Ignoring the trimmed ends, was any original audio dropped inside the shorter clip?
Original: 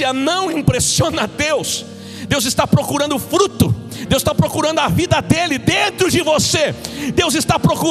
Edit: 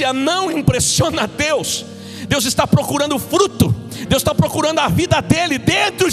no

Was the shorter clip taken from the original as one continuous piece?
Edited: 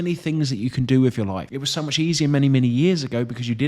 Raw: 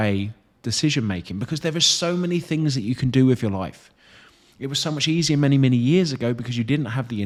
no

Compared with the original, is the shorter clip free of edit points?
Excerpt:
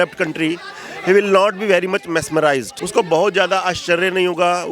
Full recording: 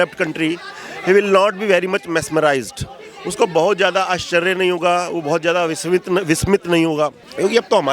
no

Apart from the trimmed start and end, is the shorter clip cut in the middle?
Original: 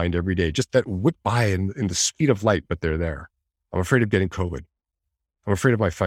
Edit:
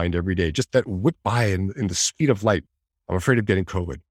yes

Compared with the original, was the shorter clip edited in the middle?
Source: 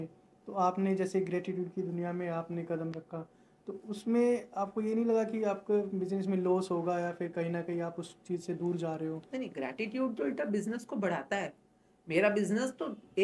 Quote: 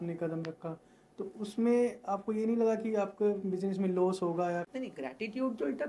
yes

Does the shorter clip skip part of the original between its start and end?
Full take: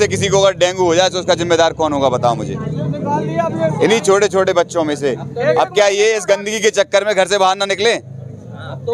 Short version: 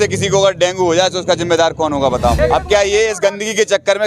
yes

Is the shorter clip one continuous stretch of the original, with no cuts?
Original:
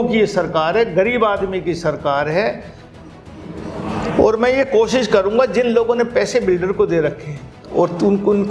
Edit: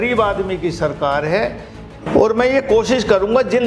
no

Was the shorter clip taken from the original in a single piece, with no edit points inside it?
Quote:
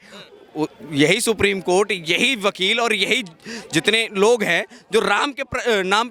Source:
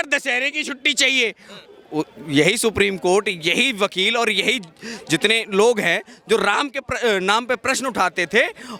yes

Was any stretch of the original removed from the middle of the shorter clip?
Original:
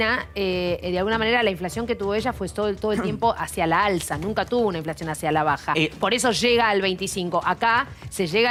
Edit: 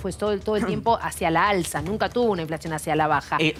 no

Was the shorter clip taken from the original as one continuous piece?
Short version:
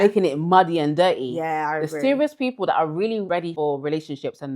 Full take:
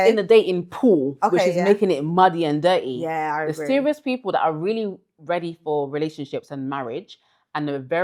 no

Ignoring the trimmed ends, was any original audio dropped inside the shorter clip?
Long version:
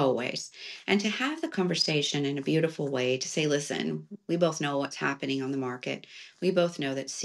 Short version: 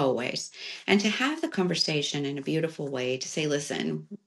no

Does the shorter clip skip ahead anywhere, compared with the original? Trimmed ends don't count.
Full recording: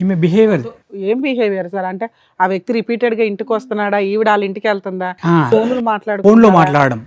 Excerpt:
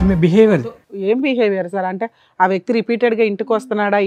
no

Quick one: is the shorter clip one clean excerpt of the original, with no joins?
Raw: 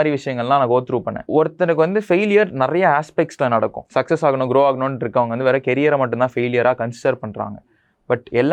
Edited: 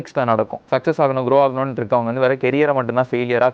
yes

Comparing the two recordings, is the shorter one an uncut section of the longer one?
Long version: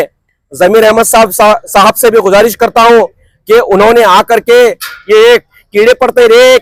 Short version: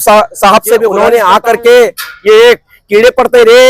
no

